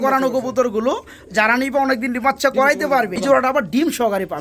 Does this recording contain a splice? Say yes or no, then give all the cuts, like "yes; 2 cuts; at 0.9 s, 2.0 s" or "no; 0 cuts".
yes; 1 cut; at 3.2 s